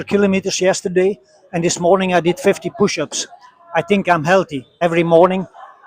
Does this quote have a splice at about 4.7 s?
yes; 1 cut; at 4.7 s

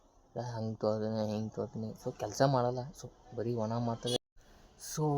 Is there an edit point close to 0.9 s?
no; 1 cut; at 4.2 s

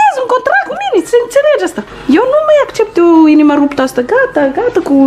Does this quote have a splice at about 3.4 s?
no; 2 cuts; at 1.0 s, 1.9 s

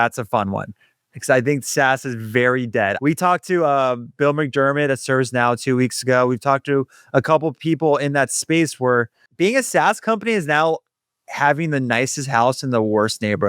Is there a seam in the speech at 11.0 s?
no; 2 cuts; at 3.0 s, 9.2 s

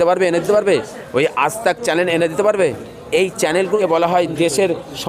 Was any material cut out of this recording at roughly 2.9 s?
yes; 2 cuts; at 2.9 s, 3.8 s

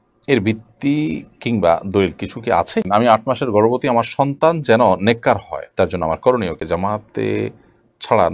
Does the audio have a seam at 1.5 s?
no; 2 cuts; at 2.9 s, 6.6 s

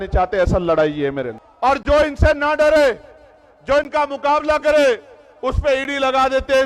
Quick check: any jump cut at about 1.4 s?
yes; 1 cut; at 1.4 s

